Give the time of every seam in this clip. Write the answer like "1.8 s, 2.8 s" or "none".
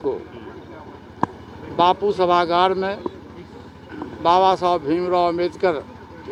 none